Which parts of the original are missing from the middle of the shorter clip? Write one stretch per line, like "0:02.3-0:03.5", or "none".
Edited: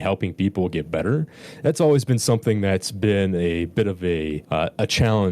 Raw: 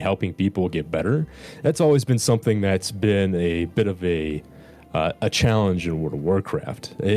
0:04.4-0:04.8